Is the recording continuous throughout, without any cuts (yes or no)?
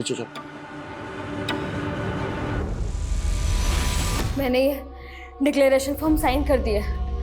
no